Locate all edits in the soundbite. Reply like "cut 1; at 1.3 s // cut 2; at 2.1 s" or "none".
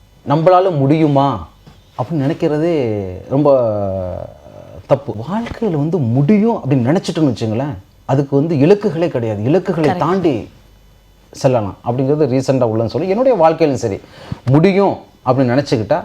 cut 1; at 5.2 s